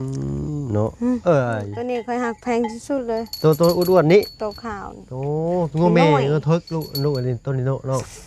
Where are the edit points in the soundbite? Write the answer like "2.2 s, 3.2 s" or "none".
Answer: 1.7 s